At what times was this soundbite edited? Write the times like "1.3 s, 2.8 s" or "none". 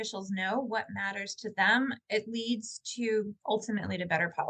none